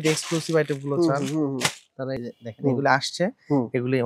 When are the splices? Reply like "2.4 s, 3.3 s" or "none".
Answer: 2.2 s